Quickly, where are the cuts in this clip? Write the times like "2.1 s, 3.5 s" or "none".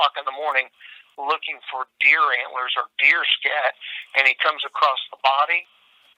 none